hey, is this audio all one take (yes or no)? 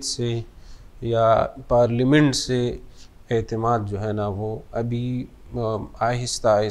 yes